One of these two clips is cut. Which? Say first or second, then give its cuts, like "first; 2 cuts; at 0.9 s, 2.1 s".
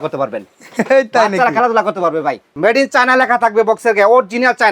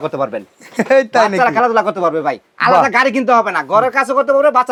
first; 1 cut; at 2.5 s